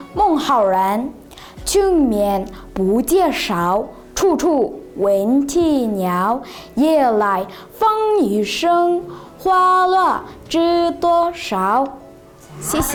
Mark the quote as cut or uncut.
uncut